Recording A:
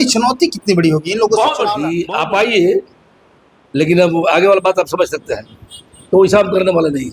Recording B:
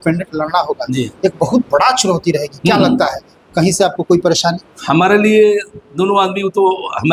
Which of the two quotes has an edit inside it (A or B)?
A